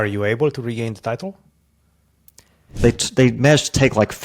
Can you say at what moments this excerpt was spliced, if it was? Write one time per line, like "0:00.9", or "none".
0:02.7